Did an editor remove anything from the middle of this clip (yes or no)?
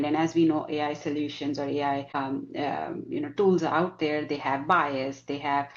yes